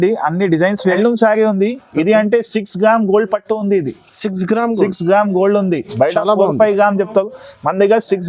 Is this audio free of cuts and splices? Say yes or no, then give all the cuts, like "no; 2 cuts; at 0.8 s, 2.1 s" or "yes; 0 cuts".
no; 1 cut; at 1.0 s